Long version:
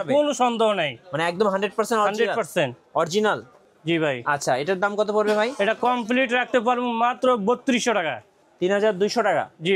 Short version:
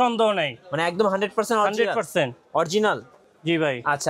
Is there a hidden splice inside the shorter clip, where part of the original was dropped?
no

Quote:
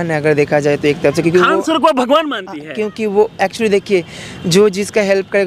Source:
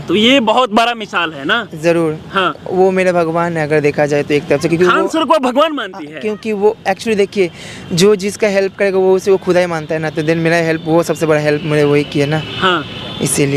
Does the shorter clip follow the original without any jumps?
yes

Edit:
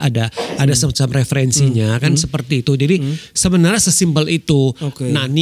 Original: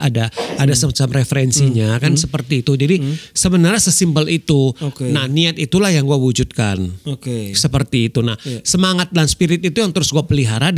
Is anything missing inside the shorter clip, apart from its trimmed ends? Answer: no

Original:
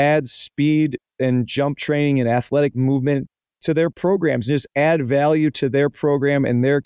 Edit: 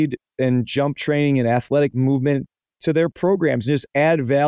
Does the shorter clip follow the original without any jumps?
yes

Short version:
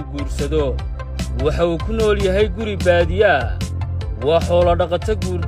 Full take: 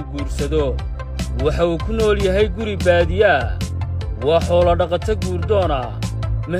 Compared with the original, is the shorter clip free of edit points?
yes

